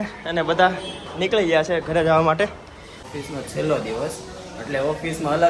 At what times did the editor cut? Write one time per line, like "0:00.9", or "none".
0:03.1